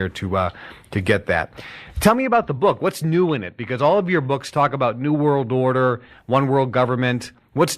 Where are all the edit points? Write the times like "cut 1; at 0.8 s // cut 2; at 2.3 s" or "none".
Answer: cut 1; at 1.3 s